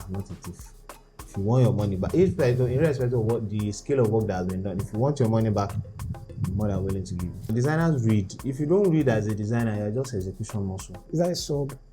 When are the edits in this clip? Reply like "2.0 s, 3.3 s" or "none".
7.5 s, 11.0 s